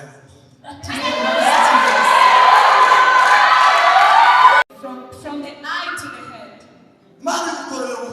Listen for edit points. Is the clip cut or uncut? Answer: cut